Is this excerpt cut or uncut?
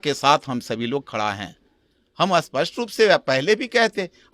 uncut